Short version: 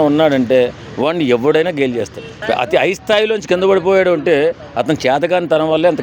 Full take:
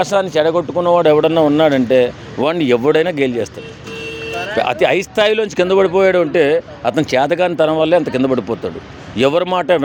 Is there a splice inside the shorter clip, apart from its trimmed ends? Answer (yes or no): yes